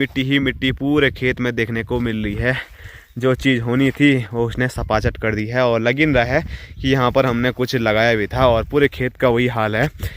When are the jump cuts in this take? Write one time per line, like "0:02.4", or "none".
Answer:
none